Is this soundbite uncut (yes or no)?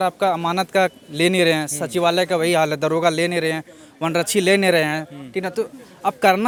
yes